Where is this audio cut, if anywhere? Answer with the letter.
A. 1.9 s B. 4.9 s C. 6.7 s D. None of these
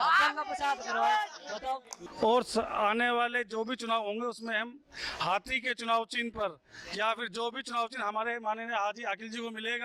A